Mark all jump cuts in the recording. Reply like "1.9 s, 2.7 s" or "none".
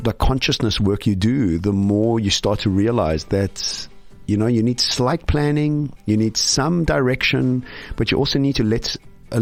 none